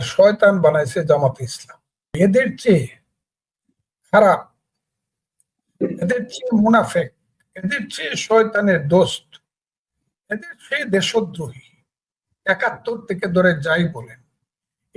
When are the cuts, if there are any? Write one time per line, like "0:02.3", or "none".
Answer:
0:02.2